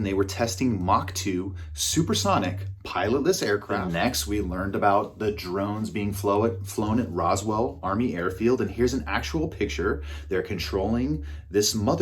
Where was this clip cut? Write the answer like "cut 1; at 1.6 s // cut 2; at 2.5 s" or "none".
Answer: cut 1; at 3.7 s